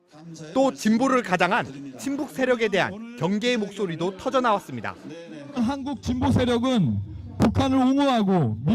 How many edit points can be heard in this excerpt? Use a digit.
1